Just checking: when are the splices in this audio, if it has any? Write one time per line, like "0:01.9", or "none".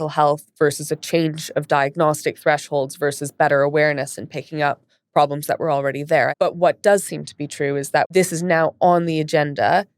0:06.3
0:08.1